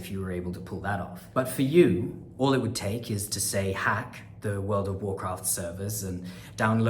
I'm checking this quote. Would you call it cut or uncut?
cut